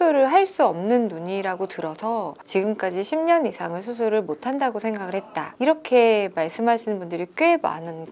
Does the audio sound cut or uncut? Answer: uncut